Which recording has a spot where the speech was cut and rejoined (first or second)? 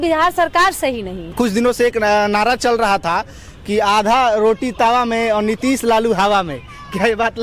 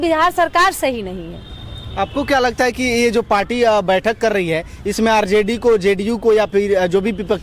first